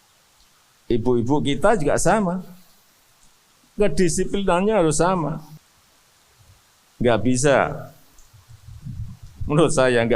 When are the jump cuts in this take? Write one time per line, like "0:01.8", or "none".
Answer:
0:05.6